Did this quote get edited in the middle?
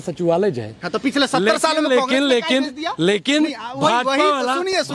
no; 0 cuts

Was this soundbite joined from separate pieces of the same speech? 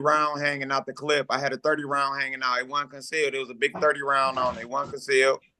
no; 0 cuts

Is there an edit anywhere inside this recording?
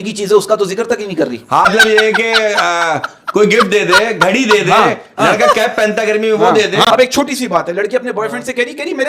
yes; 2 cuts; at 1.7 s, 6.8 s

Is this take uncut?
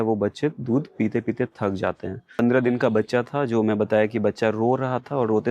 no; 1 cut; at 2.3 s

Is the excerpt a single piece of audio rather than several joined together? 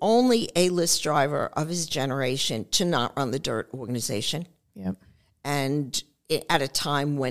yes; 0 cuts

